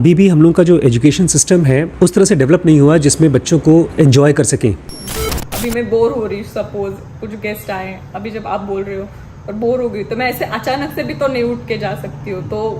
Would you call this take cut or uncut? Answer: cut